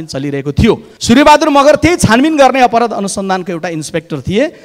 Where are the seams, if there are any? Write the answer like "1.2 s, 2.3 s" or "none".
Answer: 0.9 s